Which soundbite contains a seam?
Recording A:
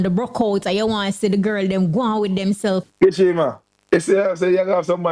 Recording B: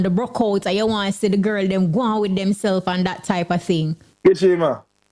A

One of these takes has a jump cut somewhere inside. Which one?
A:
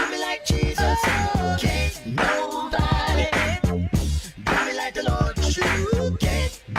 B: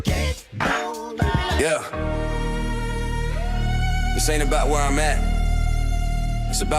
B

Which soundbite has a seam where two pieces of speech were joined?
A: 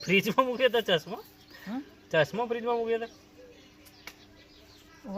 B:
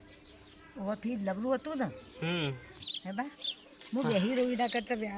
B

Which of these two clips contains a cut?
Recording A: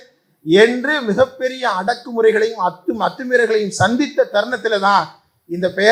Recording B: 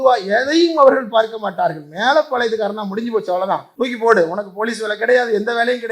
B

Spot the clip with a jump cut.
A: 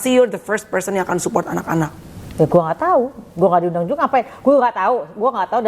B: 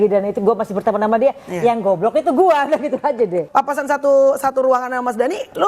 B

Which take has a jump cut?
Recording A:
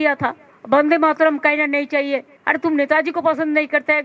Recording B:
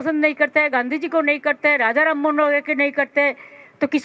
A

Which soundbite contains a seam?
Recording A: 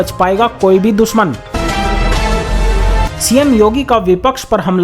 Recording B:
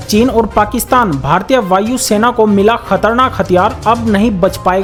A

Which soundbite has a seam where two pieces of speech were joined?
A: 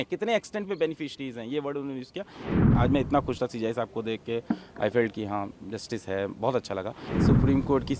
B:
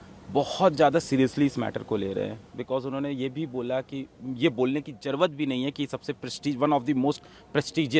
A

